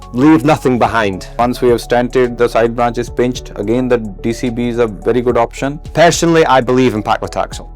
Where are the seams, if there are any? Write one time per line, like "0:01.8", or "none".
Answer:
0:01.4
0:05.8